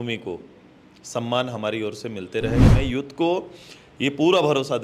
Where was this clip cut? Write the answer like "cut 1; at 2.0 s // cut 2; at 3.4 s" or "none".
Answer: cut 1; at 2.6 s